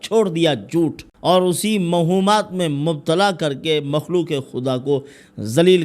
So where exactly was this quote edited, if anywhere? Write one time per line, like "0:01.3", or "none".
0:01.1

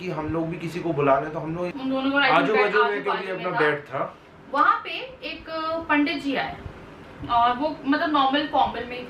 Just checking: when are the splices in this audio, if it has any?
0:01.7

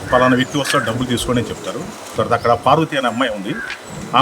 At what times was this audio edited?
0:02.1

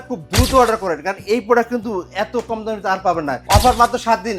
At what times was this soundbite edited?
0:03.4

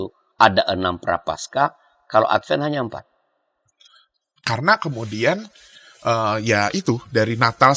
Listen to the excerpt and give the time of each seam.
none

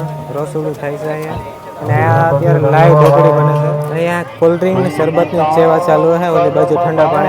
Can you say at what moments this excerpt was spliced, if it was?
0:03.8

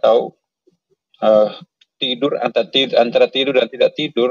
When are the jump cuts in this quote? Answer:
none

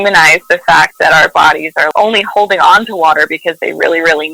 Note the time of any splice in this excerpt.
none

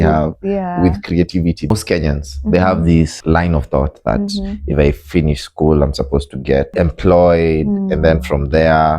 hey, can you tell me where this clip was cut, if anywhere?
0:01.7
0:03.1
0:06.7

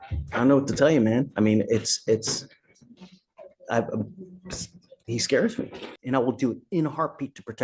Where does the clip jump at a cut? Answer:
0:05.9

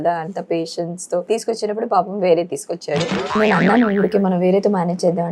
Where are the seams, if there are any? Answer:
0:01.3
0:03.4

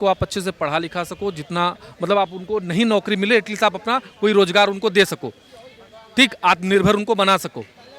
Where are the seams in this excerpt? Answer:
none

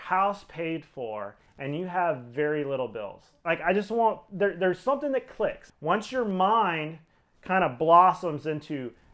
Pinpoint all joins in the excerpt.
0:05.7

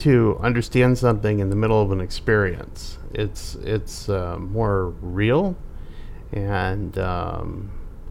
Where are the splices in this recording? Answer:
none

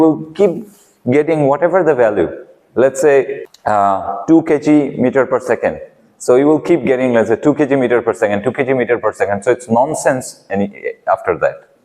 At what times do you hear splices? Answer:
0:03.4

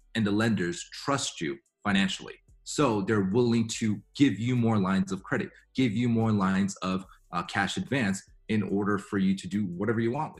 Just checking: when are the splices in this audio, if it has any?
none

